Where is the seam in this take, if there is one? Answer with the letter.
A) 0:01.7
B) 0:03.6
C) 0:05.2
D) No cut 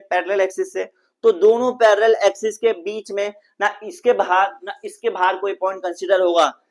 D